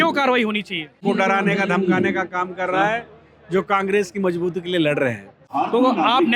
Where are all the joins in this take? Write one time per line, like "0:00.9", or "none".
0:01.0
0:05.5